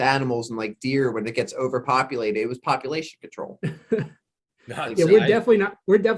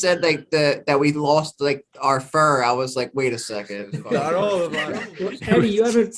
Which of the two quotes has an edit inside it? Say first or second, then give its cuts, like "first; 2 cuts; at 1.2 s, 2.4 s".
second; 1 cut; at 4.8 s